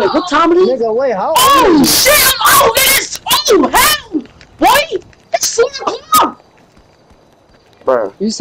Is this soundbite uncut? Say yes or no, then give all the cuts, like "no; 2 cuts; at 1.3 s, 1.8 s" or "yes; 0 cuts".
yes; 0 cuts